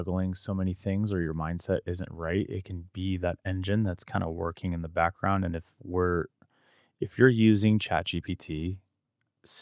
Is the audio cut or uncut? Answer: uncut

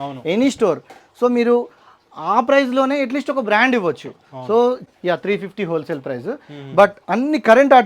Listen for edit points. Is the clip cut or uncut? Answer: cut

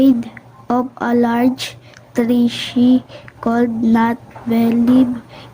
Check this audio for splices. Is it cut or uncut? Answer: cut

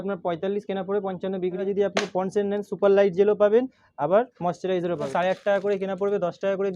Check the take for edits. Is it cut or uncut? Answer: cut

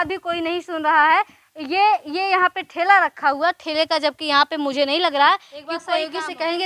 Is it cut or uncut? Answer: cut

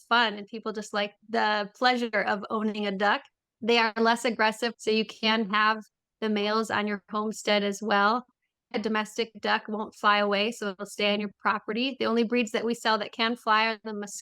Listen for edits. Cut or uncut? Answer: cut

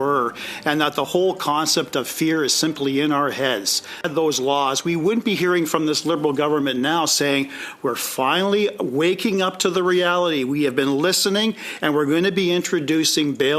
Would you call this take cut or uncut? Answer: cut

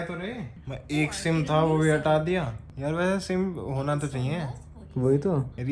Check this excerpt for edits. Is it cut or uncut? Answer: uncut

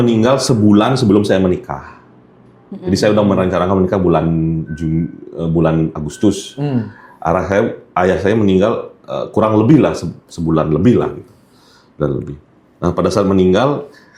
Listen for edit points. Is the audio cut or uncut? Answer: uncut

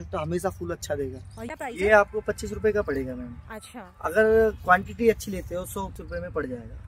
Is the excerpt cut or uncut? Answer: cut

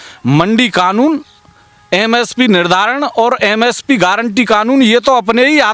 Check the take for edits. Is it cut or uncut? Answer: uncut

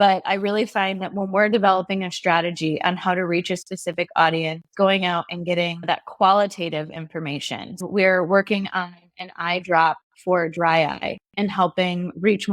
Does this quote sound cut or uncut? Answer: cut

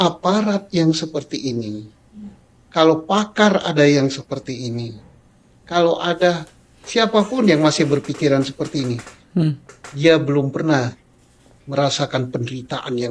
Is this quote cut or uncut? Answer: uncut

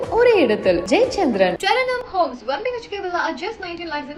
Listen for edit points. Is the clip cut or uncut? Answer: uncut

